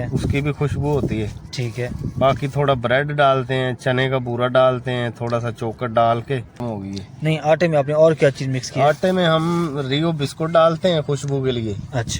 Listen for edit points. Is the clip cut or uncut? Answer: cut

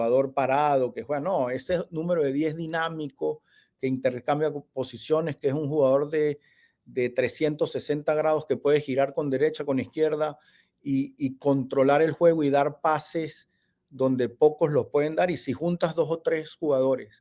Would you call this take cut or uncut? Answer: uncut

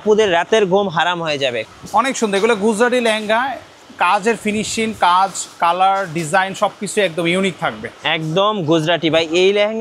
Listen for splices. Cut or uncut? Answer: cut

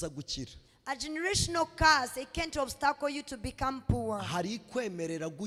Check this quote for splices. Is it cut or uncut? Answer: uncut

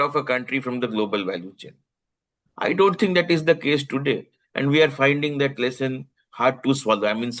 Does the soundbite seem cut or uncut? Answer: uncut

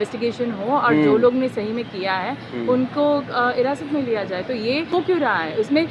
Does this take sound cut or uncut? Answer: cut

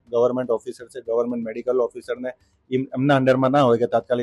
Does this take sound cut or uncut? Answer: uncut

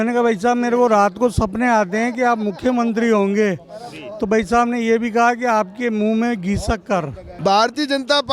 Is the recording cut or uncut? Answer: cut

